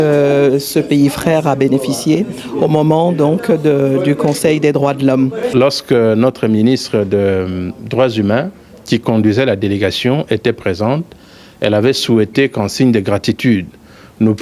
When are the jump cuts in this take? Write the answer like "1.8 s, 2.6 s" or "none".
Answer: 5.5 s